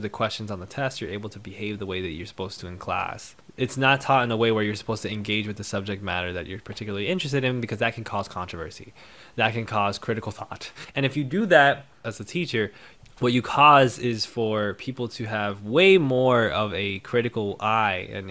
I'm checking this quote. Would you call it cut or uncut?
cut